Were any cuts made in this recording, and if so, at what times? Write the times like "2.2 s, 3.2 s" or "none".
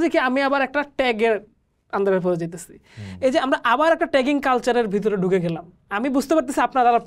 none